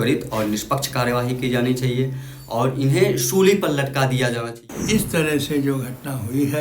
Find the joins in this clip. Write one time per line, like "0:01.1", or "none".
0:04.7